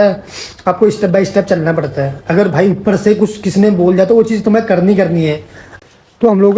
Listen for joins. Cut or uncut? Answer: cut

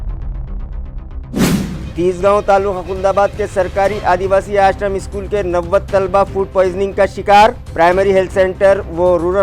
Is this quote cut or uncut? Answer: cut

